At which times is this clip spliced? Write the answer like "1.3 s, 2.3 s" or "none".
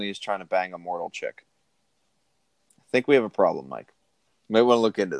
none